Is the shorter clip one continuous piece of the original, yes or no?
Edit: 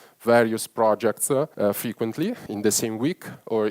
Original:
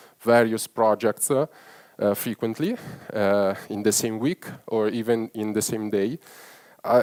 no